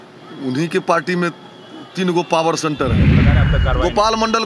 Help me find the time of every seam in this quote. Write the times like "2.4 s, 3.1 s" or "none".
3.3 s